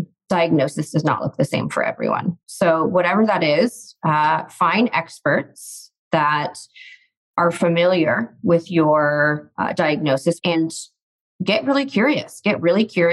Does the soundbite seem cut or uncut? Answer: cut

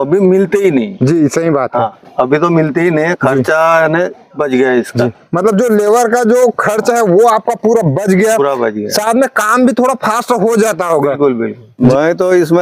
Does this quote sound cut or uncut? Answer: uncut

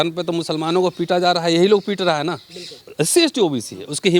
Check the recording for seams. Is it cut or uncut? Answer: cut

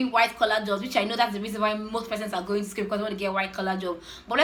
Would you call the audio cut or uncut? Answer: uncut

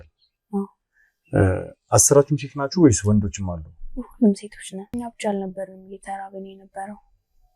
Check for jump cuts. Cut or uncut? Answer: cut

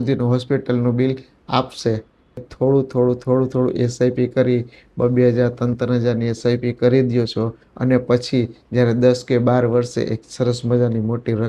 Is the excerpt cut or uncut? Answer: cut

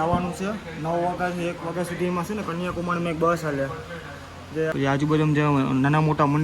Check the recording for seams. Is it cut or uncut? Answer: cut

